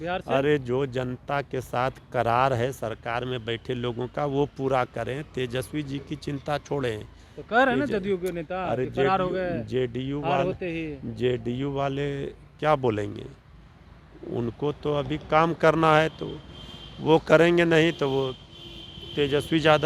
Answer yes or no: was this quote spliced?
no